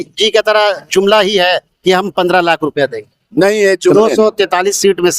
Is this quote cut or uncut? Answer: cut